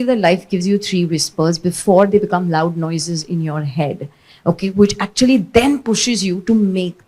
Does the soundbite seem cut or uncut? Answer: uncut